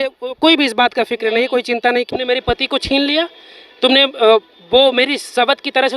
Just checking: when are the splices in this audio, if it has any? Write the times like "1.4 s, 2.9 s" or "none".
2.1 s